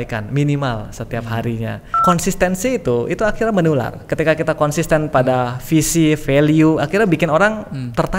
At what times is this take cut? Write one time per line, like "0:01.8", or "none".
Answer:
0:02.0